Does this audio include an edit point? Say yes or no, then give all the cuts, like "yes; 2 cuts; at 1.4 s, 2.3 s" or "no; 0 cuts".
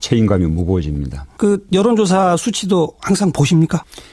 no; 0 cuts